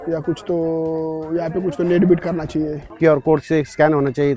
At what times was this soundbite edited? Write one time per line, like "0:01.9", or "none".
0:02.9